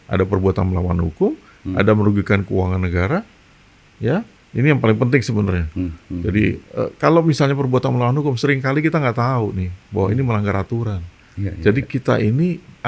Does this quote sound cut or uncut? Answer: uncut